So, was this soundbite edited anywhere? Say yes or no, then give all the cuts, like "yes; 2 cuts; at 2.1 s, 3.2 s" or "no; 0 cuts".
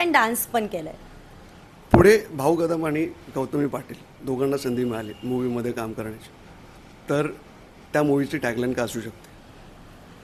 no; 0 cuts